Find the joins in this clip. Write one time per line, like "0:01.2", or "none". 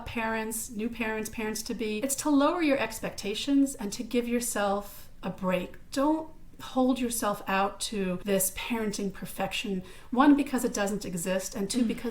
0:02.0
0:08.2